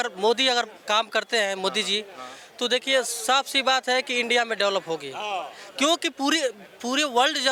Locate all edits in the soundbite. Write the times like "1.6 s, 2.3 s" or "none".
none